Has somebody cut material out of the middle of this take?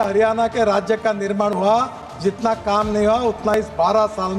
no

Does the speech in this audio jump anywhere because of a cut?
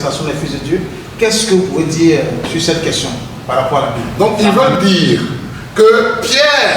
yes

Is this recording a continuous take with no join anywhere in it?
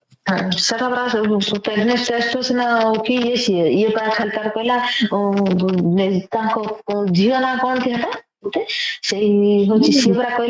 yes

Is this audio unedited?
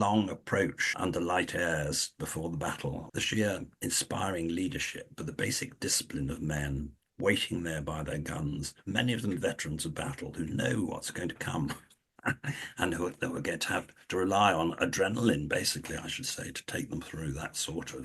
no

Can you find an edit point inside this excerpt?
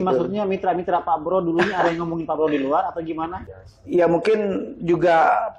yes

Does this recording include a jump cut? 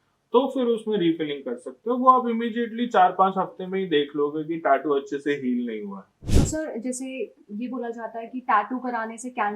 yes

